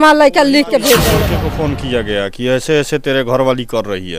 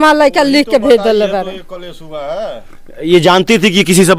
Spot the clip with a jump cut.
first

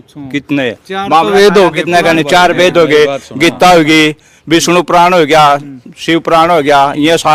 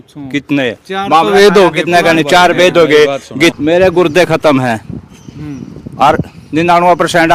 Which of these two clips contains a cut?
second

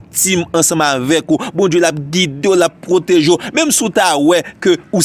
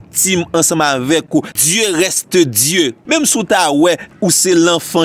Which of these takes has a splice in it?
second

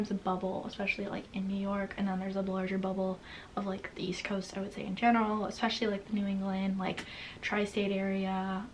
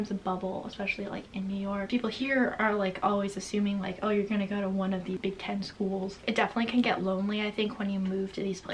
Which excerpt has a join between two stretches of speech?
second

